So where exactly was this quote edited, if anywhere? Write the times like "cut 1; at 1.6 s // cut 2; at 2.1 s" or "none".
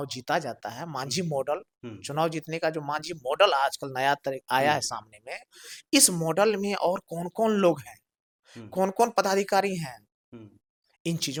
none